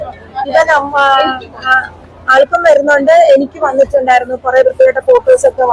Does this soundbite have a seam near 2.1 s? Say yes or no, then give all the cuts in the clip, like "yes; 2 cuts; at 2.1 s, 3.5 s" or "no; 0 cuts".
no; 0 cuts